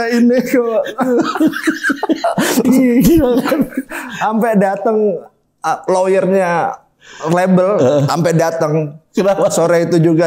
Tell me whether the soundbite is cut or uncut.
uncut